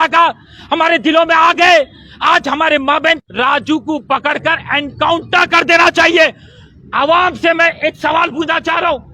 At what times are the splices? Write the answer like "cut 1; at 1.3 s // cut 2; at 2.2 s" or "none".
cut 1; at 3.2 s